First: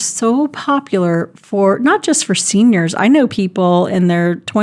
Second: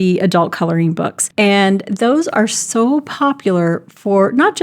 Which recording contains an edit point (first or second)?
second